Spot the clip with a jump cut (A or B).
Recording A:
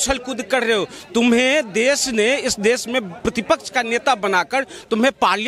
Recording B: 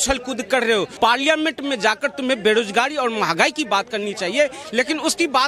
B